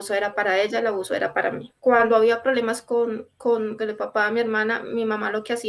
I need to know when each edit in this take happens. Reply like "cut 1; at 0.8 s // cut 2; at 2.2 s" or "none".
cut 1; at 1.7 s